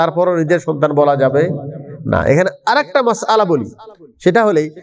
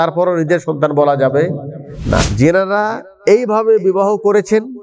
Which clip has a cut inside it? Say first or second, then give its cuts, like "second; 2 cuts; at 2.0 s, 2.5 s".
second; 1 cut; at 2.2 s